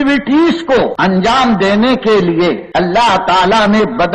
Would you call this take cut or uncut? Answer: cut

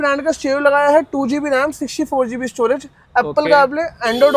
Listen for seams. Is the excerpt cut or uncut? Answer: uncut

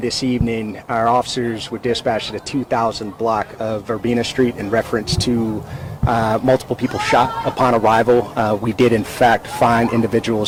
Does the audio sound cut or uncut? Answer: uncut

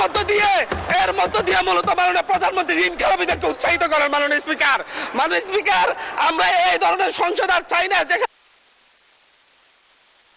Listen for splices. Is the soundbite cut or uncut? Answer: uncut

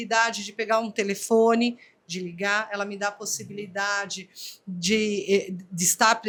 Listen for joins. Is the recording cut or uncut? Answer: uncut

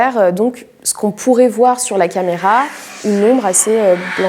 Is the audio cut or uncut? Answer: uncut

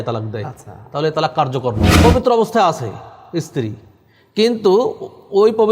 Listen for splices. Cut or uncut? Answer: cut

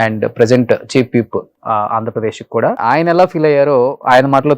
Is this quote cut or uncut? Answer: cut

